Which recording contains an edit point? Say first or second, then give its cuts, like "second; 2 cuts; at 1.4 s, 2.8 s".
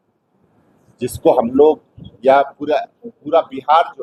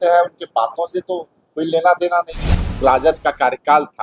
second; 1 cut; at 2.8 s